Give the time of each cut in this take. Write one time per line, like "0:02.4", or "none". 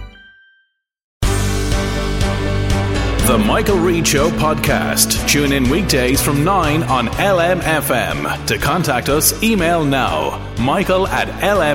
0:01.0